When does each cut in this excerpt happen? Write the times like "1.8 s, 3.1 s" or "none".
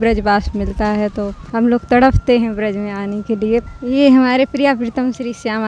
1.4 s, 3.7 s